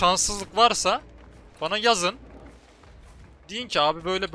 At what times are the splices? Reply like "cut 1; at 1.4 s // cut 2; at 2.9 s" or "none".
none